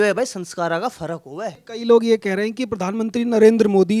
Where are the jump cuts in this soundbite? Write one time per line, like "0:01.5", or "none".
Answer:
0:01.6